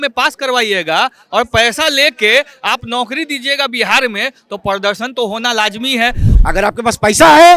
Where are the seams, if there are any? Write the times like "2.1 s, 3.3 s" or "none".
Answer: 6.2 s